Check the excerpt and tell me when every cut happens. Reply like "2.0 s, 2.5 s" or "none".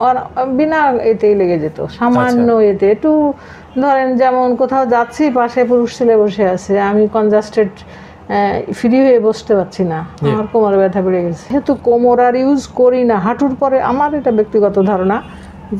11.5 s